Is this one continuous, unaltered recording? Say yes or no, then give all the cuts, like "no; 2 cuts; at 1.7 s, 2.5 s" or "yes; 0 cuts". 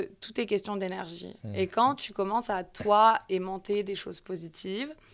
yes; 0 cuts